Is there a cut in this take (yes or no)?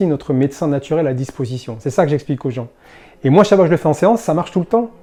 no